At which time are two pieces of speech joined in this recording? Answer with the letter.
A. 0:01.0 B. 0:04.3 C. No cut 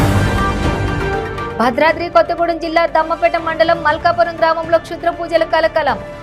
C